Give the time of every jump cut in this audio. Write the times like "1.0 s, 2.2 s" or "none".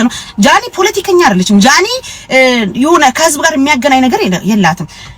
none